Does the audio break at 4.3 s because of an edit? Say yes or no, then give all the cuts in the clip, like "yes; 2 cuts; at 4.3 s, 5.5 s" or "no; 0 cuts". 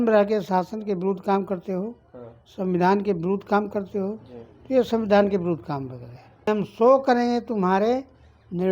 no; 1 cut; at 6.5 s